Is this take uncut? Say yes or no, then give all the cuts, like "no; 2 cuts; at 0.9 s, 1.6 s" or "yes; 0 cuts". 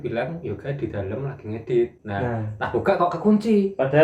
no; 1 cut; at 2.0 s